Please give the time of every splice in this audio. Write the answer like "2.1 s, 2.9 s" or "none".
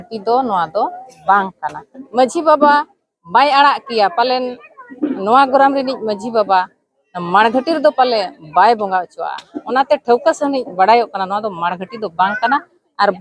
2.0 s